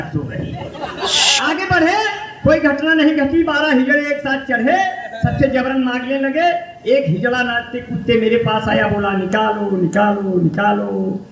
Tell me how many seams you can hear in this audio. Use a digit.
1